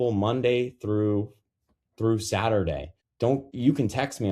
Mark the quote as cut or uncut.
cut